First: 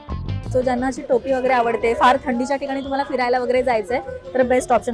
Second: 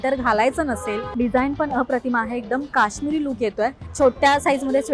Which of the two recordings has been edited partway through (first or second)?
second